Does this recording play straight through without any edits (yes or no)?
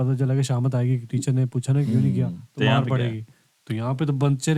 yes